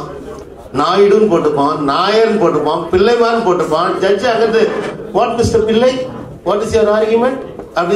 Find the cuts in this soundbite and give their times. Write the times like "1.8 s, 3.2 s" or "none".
none